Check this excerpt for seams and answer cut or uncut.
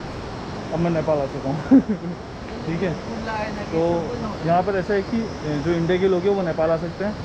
uncut